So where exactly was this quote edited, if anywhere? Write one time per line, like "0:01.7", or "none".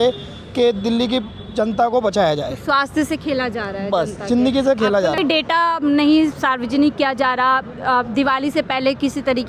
0:05.2

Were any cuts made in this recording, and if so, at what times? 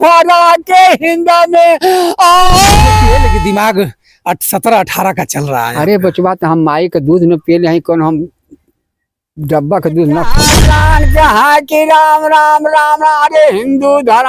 0:03.2
0:10.6

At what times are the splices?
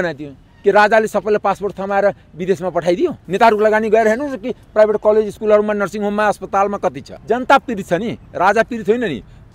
0:03.2
0:07.1

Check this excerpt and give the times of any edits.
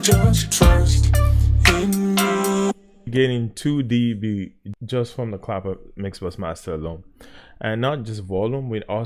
0:03.0
0:04.7

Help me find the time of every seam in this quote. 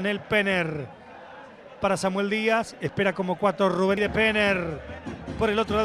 0:04.0

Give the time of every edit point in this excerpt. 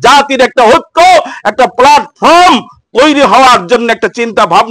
none

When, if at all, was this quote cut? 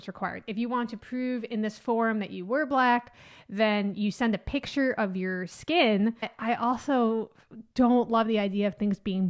0:06.2

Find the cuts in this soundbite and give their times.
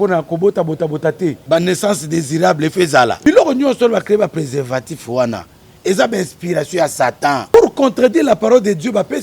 0:01.4
0:03.2
0:07.5

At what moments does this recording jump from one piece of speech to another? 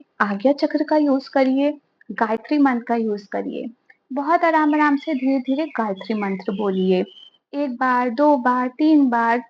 none

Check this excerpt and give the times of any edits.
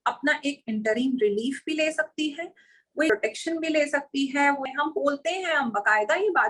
0:03.1
0:04.7

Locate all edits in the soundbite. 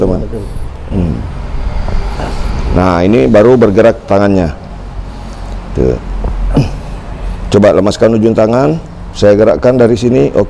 none

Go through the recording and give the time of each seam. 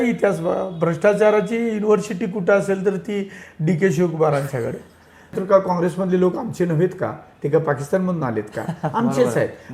0:05.4

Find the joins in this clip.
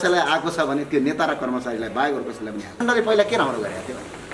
0:02.8

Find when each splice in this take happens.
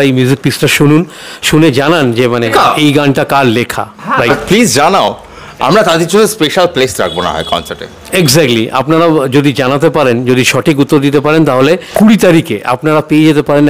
0:02.5
0:04.3
0:11.9

